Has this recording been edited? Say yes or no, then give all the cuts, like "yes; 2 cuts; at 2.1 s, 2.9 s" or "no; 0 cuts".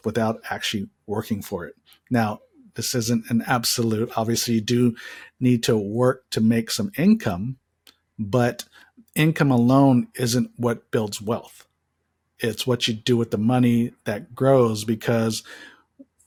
no; 0 cuts